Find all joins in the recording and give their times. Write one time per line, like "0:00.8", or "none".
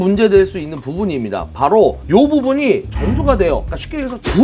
0:02.0

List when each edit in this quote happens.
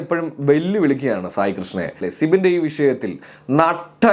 0:02.1

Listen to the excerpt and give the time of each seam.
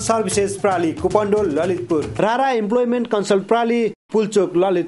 0:02.1

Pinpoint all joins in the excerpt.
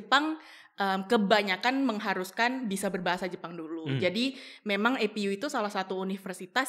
none

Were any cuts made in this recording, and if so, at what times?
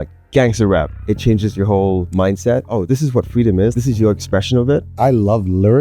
0:01.0
0:02.5
0:03.7
0:04.9

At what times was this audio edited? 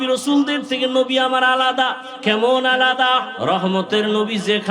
0:02.1
0:03.3

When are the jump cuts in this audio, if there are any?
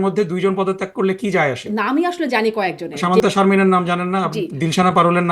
0:01.6
0:03.0

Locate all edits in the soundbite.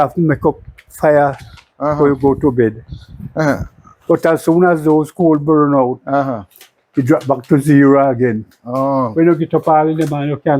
none

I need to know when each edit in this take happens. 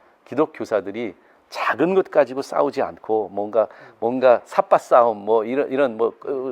none

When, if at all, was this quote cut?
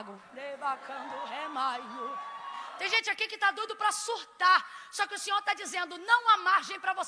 0:02.7

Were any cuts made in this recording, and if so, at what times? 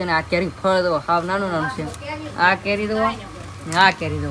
none

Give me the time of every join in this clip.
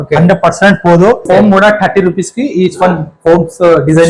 0:01.2

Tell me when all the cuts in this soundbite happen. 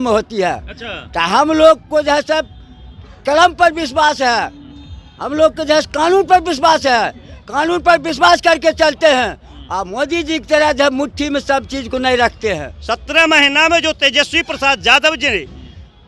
0:12.7

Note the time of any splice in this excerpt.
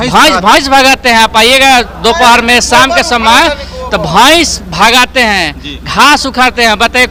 none

